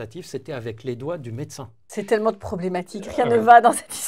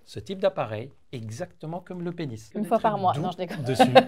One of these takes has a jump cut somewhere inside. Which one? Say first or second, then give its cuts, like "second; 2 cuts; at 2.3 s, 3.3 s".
first; 1 cut; at 1.7 s